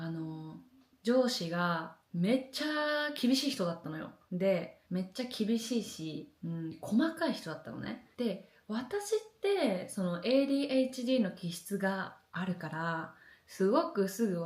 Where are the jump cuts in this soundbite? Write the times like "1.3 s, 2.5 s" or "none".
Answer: none